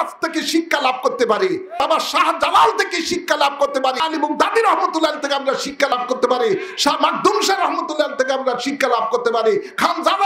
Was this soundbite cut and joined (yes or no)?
yes